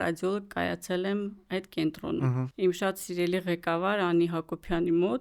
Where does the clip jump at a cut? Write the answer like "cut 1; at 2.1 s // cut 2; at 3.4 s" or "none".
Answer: cut 1; at 2.5 s